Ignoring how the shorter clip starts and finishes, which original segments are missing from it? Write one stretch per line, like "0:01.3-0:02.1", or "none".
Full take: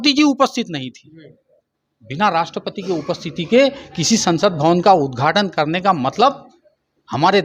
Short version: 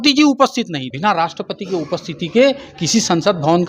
0:00.9-0:02.1